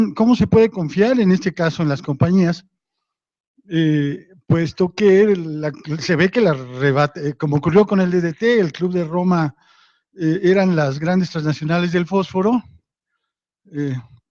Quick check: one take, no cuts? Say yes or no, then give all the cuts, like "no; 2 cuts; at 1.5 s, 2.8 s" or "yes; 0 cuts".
yes; 0 cuts